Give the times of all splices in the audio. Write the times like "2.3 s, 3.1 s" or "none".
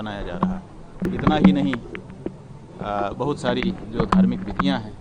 1.0 s